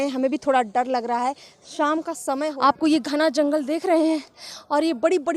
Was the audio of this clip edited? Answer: yes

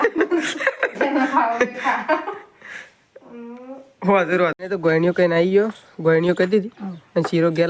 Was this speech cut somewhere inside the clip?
yes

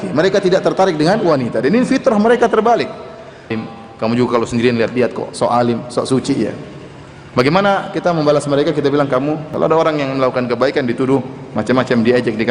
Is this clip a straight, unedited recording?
no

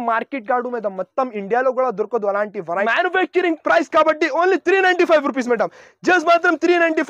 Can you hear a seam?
yes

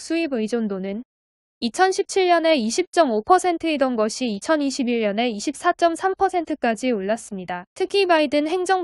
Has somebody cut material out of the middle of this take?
yes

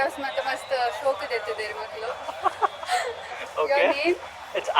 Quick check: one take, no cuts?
yes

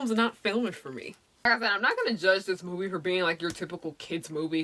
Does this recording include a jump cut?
no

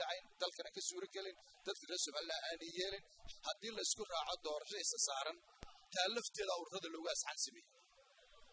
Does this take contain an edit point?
yes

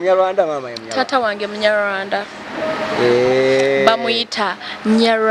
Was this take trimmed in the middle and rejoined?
no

